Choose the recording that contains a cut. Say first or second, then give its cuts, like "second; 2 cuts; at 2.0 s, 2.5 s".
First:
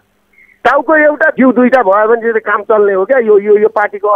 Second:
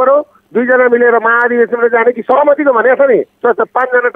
first; 1 cut; at 1.3 s